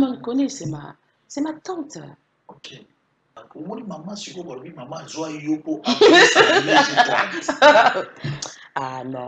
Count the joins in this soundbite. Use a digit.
1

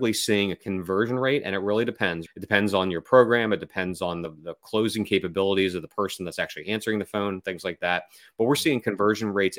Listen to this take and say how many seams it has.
2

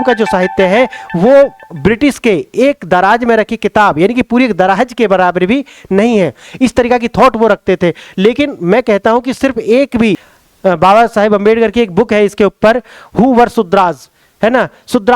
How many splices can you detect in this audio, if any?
1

